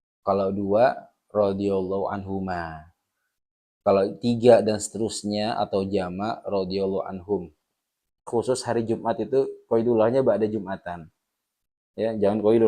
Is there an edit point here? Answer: yes; 1 cut; at 8.2 s

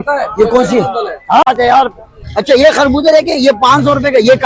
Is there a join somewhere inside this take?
yes; 1 cut; at 1.4 s

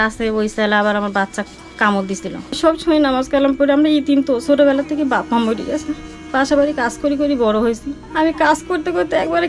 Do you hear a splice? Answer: yes; 2 cuts; at 2.6 s, 8.0 s

